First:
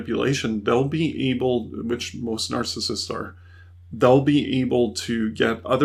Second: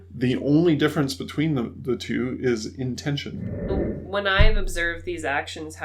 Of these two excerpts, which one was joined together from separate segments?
second; 1 cut; at 3.7 s

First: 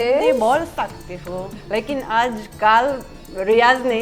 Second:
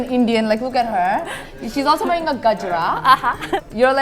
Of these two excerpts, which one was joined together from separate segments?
second; 1 cut; at 1.4 s

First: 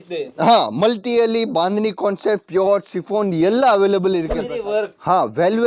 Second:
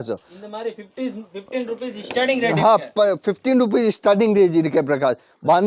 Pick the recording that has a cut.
first; 1 cut; at 4.4 s

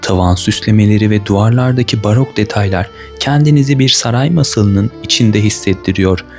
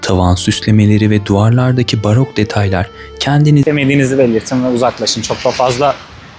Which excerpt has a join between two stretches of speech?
second; 1 cut; at 3.6 s

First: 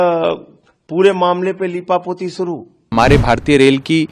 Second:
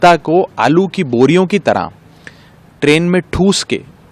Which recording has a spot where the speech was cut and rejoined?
first; 1 cut; at 2.8 s

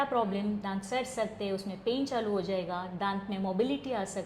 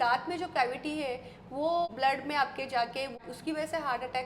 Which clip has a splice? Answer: second; 2 cuts; at 1.9 s, 3.2 s

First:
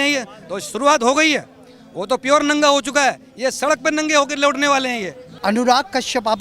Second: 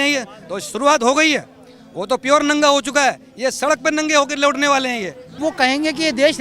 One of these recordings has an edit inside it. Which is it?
second; 1 cut; at 5.4 s

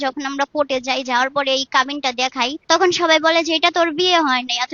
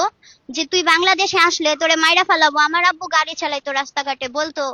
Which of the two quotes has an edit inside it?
first; 1 cut; at 2.6 s

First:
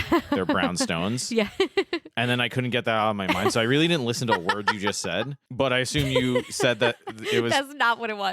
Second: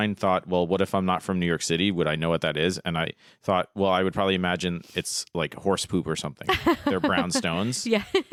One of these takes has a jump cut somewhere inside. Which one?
first; 1 cut; at 5.4 s

